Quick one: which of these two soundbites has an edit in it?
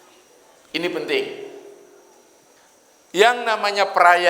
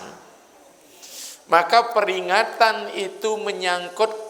first; 1 cut; at 2.5 s

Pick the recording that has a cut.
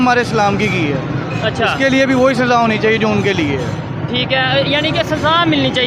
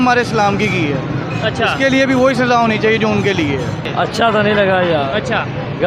second; 1 cut; at 3.8 s

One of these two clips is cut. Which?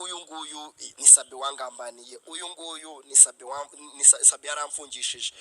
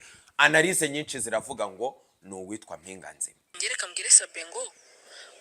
second; 1 cut; at 3.6 s

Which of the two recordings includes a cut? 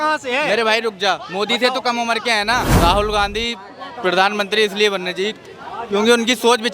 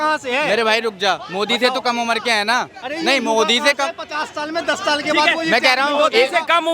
first; 1 cut; at 2.7 s

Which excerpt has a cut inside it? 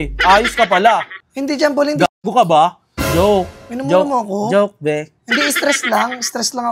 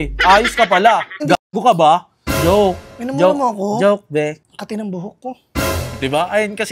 second; 2 cuts; at 1.2 s, 4.4 s

